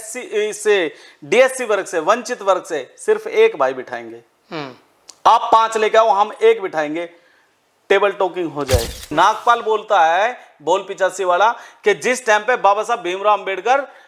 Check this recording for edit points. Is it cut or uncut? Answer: cut